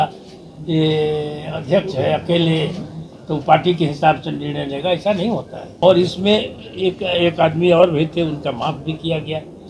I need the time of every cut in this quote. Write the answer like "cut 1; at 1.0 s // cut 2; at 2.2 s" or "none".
cut 1; at 5.8 s

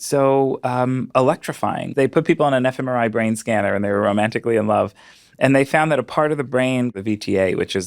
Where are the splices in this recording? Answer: cut 1; at 1.9 s // cut 2; at 7.0 s

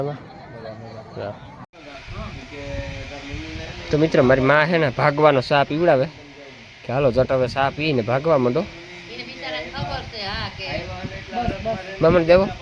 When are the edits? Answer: cut 1; at 1.7 s

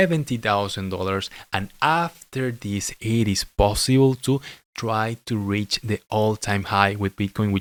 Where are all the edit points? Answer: none

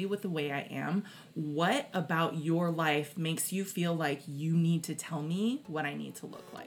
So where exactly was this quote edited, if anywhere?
none

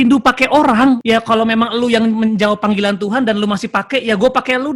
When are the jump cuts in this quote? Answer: cut 1; at 1.0 s

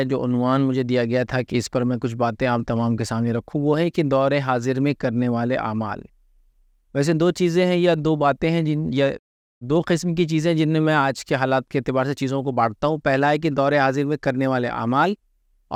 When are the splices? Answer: none

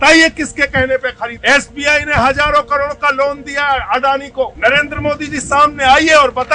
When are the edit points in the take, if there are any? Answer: cut 1; at 1.3 s // cut 2; at 4.5 s

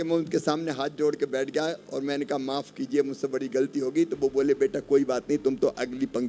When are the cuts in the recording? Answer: none

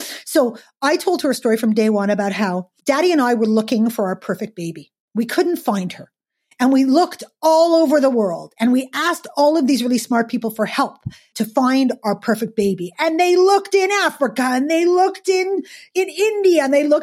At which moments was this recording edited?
cut 1; at 2.7 s // cut 2; at 11.3 s // cut 3; at 15.9 s

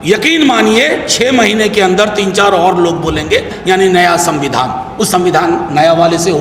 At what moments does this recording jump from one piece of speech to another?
cut 1; at 3.5 s

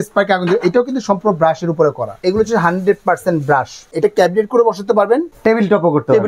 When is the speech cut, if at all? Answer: cut 1; at 2.2 s // cut 2; at 3.9 s // cut 3; at 5.3 s

